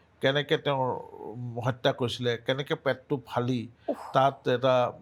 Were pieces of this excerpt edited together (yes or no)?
no